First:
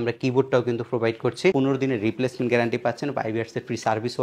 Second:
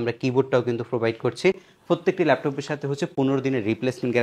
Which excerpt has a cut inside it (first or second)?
first